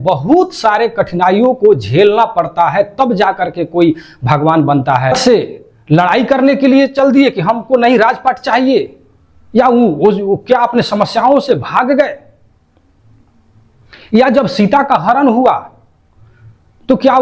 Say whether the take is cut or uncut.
cut